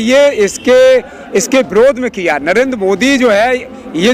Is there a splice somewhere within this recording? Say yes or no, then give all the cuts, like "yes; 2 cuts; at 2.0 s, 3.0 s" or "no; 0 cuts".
no; 0 cuts